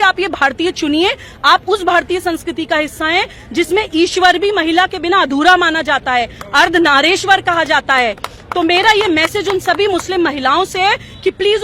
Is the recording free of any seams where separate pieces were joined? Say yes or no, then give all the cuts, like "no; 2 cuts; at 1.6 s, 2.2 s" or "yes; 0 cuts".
yes; 0 cuts